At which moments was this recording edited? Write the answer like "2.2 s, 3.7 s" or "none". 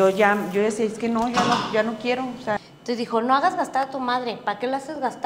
2.7 s